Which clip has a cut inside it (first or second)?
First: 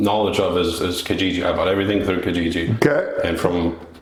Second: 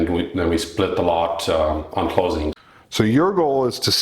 second